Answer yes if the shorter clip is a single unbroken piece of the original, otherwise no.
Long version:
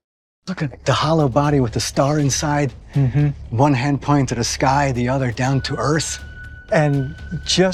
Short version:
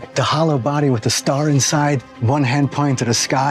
no